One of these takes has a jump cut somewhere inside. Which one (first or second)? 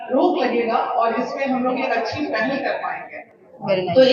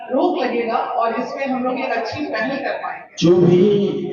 second